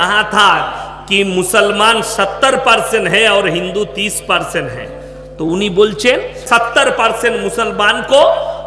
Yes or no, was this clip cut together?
yes